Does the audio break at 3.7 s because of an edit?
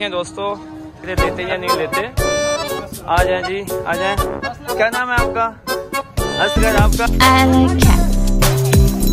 no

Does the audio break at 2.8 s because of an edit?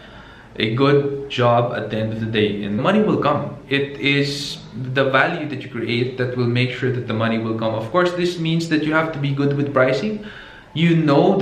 yes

